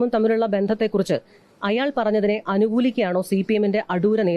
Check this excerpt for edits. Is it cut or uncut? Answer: uncut